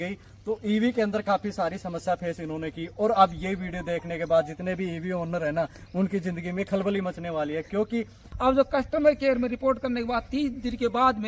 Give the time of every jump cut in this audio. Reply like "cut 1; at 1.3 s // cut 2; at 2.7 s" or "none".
cut 1; at 8.2 s